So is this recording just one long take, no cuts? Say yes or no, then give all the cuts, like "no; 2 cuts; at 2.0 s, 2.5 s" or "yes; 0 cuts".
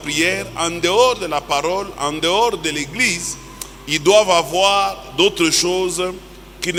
yes; 0 cuts